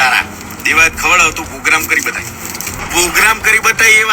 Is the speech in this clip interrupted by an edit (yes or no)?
yes